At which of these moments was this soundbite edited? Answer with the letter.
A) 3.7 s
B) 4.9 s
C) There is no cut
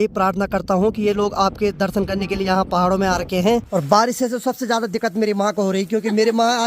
A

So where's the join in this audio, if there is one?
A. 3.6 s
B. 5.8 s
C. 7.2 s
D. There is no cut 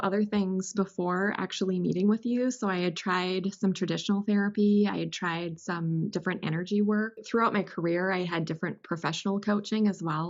C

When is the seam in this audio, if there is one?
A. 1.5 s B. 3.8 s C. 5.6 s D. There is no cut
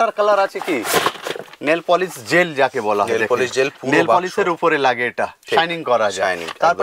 D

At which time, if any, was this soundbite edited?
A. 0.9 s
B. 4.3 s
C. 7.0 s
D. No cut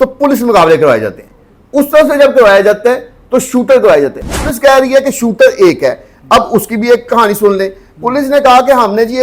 B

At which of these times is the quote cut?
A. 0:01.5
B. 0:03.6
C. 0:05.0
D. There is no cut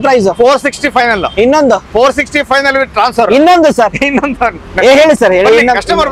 D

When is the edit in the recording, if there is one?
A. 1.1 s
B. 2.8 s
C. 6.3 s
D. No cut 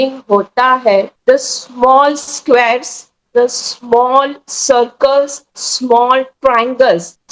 D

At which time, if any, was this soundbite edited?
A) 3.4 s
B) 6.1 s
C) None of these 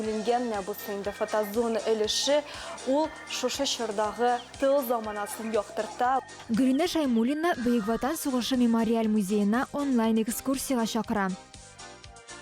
B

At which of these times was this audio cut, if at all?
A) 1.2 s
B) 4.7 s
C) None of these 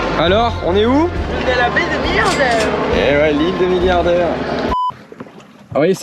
B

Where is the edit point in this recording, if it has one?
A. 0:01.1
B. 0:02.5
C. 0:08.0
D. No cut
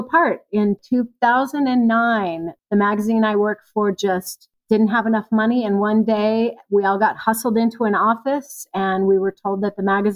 B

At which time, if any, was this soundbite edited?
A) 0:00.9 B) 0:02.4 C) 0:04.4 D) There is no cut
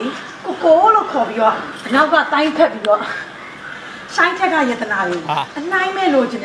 D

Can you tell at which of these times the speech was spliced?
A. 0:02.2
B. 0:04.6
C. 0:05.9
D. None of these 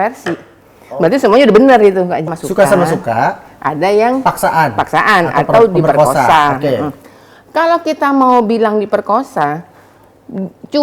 A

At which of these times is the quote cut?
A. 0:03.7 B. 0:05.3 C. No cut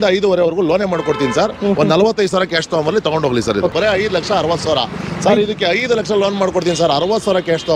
A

